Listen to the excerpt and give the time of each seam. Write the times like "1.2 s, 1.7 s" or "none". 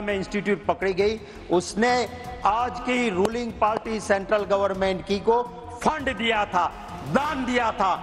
none